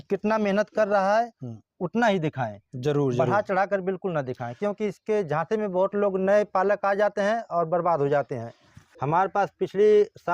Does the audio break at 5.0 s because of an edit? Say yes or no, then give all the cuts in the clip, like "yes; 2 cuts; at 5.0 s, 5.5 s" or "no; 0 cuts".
no; 1 cut; at 8.9 s